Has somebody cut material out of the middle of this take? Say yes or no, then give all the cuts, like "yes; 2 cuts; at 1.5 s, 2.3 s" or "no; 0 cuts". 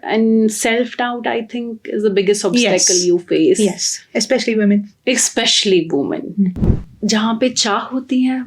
yes; 1 cut; at 6.6 s